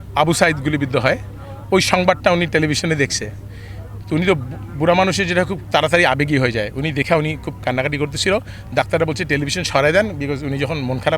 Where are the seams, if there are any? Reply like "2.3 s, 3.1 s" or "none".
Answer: none